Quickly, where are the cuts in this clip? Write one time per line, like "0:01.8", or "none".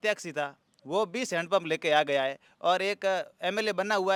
none